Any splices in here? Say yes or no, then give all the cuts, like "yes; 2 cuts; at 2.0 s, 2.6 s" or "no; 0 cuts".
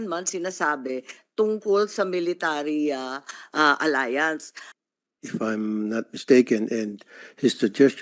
yes; 1 cut; at 4.7 s